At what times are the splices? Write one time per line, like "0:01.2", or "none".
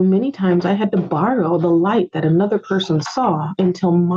none